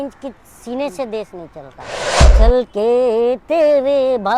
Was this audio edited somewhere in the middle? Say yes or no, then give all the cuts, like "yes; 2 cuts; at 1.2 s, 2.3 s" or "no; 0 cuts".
yes; 1 cut; at 2.2 s